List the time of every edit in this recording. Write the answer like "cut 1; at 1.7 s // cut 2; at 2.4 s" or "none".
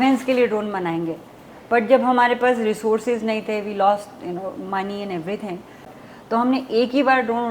cut 1; at 5.9 s